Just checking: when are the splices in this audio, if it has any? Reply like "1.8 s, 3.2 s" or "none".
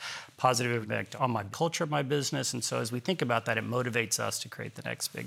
1.1 s